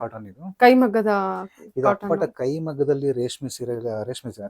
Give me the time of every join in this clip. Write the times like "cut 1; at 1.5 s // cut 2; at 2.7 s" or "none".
none

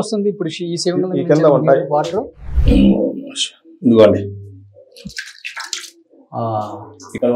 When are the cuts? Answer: none

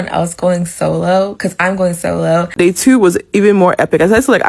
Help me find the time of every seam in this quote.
cut 1; at 2.5 s

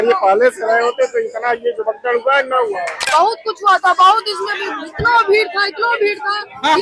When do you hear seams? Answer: cut 1; at 3.0 s

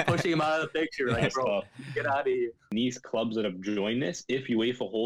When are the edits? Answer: cut 1; at 2.7 s

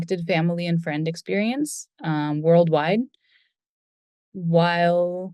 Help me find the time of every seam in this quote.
none

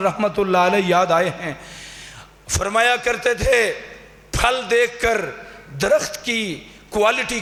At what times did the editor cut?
none

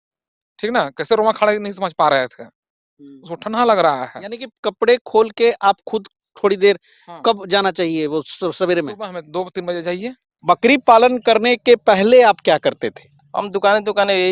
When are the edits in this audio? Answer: cut 1; at 10.3 s

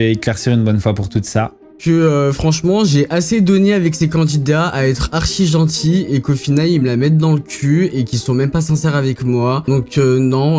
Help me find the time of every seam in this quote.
cut 1; at 1.8 s // cut 2; at 9.6 s

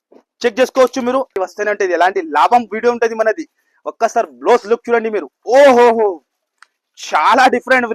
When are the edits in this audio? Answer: cut 1; at 1.3 s

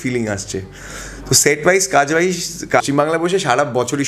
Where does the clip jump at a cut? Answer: cut 1; at 2.8 s

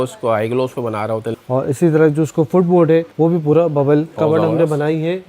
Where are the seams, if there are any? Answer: cut 1; at 1.3 s // cut 2; at 3.1 s // cut 3; at 4.2 s

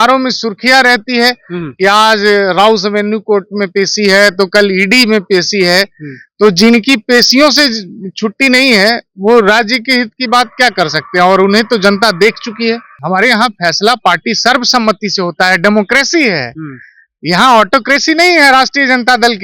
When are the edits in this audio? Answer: cut 1; at 12.9 s

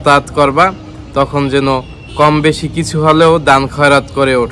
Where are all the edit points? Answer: none

